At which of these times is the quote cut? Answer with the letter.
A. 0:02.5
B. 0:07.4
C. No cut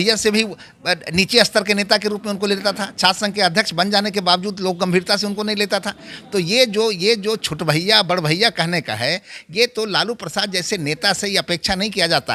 C